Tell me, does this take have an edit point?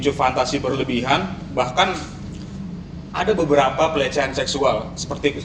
no; 0 cuts

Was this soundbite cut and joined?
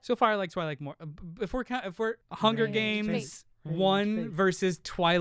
yes; 1 cut; at 2.3 s

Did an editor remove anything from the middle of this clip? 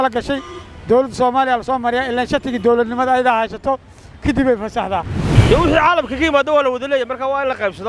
yes; 1 cut; at 5.3 s

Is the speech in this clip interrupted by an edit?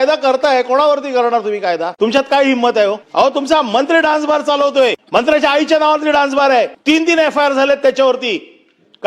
yes; 4 cuts; at 1.9 s, 3.0 s, 5.0 s, 6.8 s

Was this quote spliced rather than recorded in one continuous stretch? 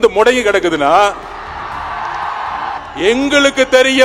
yes; 1 cut; at 2.8 s

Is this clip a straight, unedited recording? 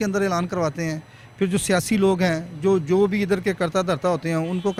yes; 0 cuts

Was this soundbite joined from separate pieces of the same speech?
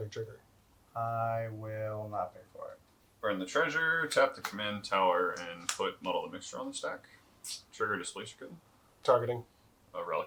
no; 0 cuts

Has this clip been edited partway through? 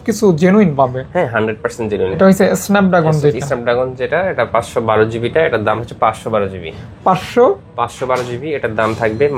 yes; 2 cuts; at 2.1 s, 5.8 s

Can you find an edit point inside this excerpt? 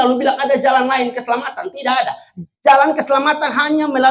no; 0 cuts

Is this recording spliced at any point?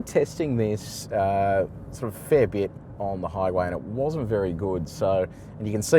no; 0 cuts

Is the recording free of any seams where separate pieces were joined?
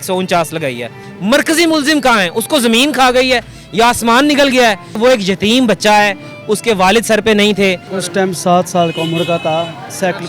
no; 3 cuts; at 1.0 s, 4.9 s, 7.9 s

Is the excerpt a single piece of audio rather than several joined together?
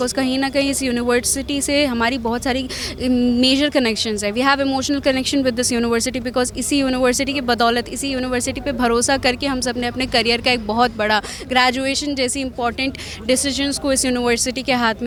yes; 0 cuts

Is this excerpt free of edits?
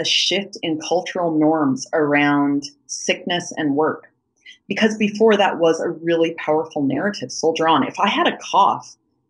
yes; 0 cuts

